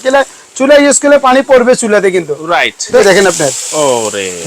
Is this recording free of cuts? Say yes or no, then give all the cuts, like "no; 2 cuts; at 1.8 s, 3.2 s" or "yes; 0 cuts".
no; 1 cut; at 3.0 s